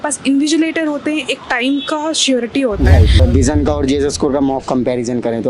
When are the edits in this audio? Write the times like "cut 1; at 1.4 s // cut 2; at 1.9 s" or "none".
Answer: cut 1; at 3.2 s